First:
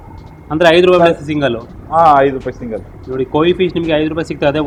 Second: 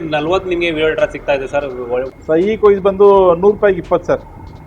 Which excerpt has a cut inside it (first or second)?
second